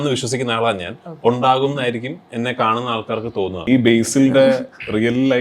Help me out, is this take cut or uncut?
cut